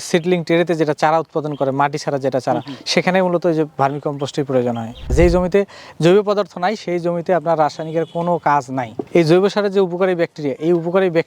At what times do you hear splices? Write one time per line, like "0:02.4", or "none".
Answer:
0:05.0